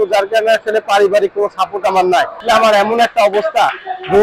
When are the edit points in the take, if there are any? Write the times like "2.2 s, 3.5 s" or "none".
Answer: 2.4 s